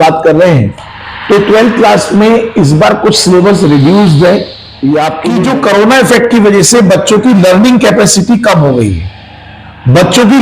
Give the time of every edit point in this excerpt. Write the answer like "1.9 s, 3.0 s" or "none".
5.2 s